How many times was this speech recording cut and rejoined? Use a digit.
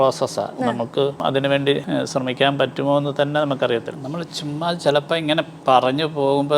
2